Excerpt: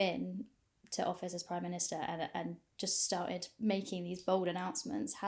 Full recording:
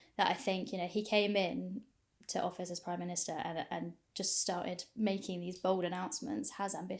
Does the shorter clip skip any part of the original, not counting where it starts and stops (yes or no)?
no